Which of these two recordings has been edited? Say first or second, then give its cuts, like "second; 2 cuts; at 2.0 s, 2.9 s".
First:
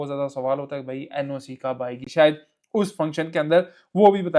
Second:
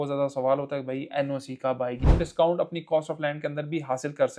second; 1 cut; at 2.1 s